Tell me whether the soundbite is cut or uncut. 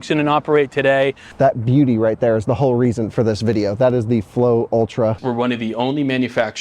cut